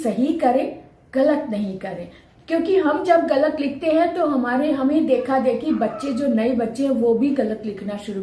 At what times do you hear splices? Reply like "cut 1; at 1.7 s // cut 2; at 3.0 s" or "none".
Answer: none